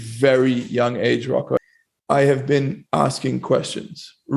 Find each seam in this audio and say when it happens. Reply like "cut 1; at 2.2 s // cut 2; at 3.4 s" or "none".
cut 1; at 1.6 s